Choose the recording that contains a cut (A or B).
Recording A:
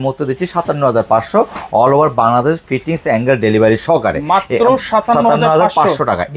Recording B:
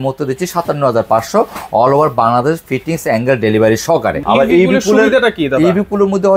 B